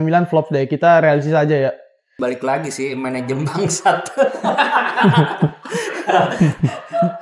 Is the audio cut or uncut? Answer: cut